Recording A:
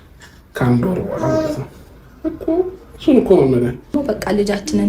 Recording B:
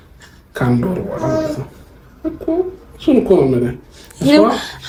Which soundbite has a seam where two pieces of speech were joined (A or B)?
A